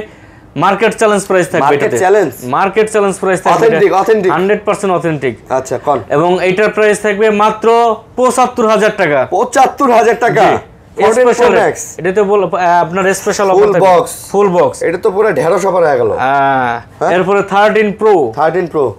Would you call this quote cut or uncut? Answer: uncut